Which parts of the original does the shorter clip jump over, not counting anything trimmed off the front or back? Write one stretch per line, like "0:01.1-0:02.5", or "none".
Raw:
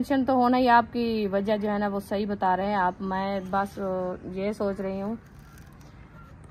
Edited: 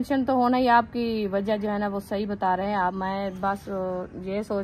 0:03.0-0:03.1